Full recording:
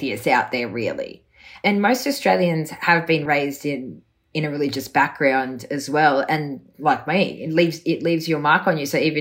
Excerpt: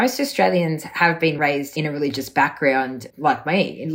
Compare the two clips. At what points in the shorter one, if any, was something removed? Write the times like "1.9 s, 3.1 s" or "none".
1.4 s, 3.0 s